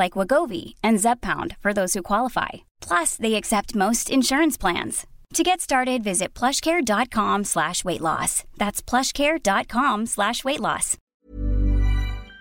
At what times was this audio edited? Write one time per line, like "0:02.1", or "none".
0:11.1